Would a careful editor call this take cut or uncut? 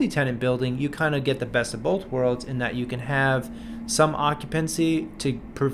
uncut